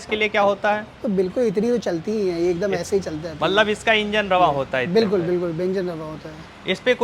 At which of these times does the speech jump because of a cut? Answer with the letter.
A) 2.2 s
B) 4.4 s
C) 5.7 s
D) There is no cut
D